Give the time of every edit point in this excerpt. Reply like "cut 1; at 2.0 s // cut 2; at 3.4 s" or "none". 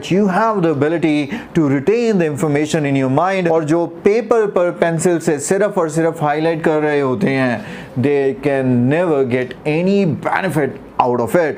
none